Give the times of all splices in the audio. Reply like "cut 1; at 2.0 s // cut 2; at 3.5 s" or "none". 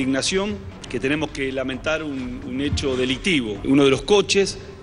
cut 1; at 3.6 s